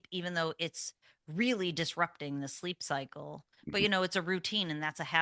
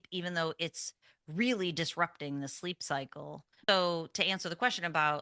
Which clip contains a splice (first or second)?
second